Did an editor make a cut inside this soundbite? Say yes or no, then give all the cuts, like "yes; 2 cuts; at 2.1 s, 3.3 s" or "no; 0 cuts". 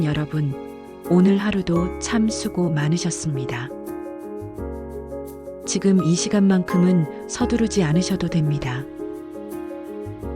yes; 3 cuts; at 3.8 s, 5.7 s, 9.4 s